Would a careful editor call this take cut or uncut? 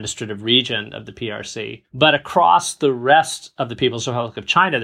cut